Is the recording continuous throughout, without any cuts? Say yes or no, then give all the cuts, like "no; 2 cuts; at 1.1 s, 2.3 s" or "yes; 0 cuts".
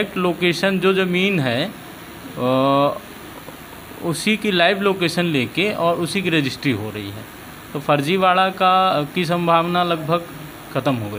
yes; 0 cuts